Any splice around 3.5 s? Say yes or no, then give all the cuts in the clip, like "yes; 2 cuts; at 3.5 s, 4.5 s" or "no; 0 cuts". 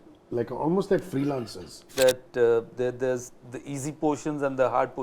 no; 1 cut; at 1.9 s